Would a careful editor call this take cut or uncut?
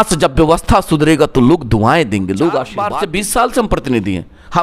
cut